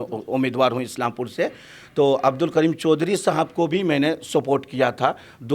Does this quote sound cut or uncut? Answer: uncut